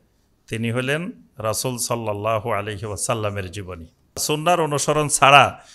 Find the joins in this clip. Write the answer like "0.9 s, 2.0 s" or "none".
4.2 s